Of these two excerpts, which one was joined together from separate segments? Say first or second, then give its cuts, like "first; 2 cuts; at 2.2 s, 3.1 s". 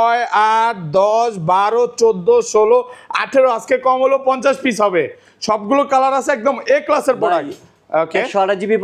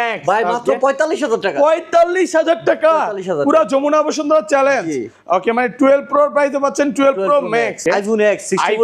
second; 1 cut; at 7.8 s